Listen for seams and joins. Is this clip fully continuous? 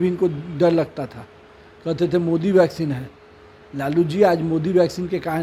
yes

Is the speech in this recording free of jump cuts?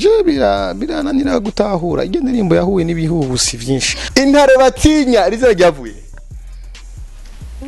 no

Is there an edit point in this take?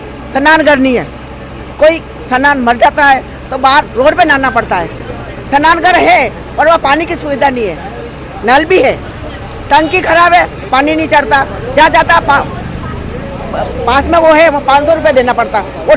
no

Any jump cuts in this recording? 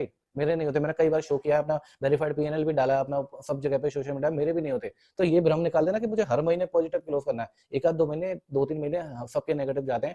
no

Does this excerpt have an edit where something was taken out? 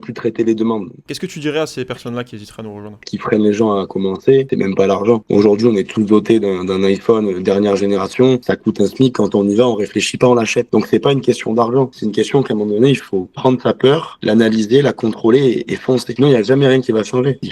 yes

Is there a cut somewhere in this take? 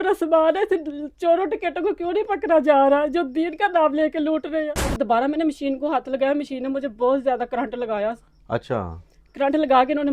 yes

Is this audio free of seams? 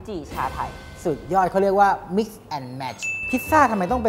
no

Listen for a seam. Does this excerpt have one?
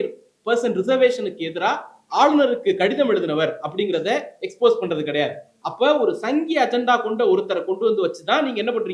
no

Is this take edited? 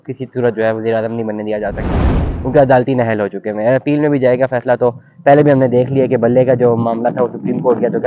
no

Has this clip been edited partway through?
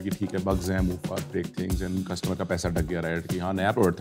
no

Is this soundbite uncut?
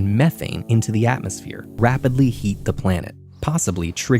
no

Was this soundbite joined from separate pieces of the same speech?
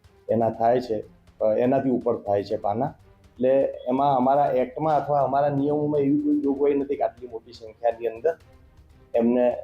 no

